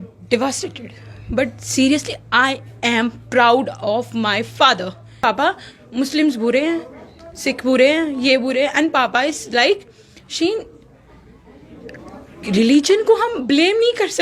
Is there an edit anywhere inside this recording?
yes; 1 cut; at 5.2 s

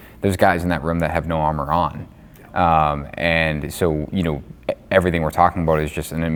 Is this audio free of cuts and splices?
yes; 0 cuts

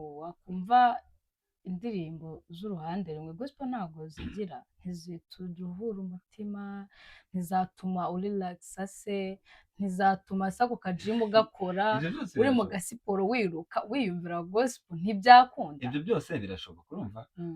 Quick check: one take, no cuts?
yes; 0 cuts

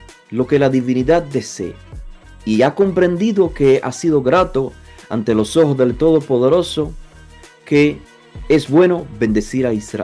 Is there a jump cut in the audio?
no; 0 cuts

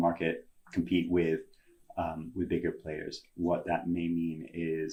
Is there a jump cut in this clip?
no; 0 cuts

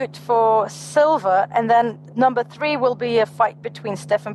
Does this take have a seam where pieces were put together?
yes; 1 cut; at 2.0 s

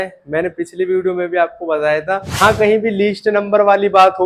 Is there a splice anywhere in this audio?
yes; 1 cut; at 2.4 s

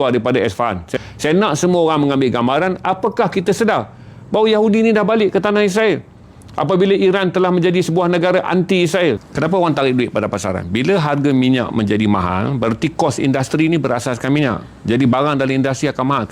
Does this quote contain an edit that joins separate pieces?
yes; 2 cuts; at 0.8 s, 9.2 s

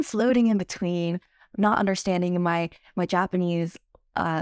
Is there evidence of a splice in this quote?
no; 0 cuts

